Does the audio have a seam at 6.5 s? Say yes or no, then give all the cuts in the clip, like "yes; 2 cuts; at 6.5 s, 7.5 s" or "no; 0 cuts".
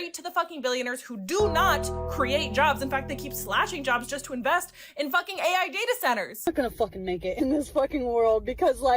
yes; 1 cut; at 6.5 s